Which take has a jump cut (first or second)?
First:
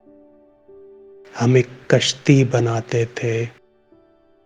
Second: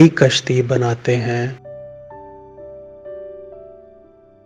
first